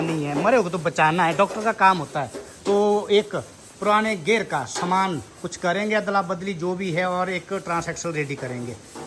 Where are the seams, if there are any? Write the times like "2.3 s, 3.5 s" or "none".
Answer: none